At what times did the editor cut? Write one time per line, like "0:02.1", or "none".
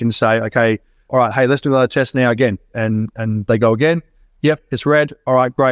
none